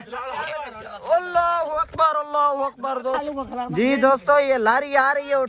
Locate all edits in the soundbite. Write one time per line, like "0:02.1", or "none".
0:03.3